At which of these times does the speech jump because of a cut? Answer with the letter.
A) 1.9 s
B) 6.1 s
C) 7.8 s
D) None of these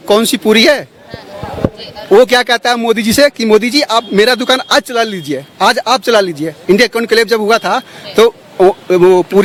D